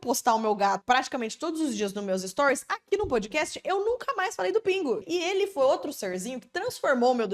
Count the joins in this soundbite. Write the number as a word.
two